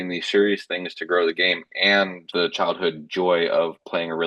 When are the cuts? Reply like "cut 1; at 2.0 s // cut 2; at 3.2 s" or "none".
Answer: cut 1; at 2.3 s